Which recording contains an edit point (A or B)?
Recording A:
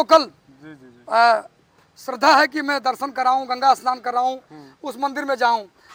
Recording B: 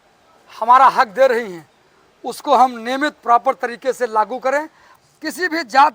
B